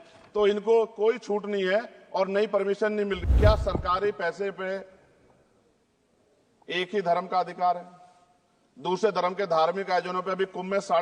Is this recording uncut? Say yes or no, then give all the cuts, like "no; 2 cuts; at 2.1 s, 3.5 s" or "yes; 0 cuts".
no; 1 cut; at 3.2 s